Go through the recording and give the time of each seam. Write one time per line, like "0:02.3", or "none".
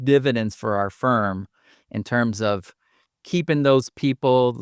none